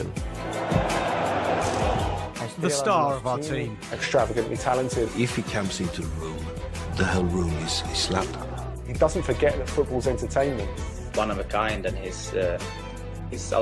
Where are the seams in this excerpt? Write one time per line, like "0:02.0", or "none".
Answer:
0:02.6